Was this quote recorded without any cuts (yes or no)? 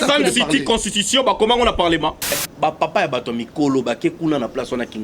no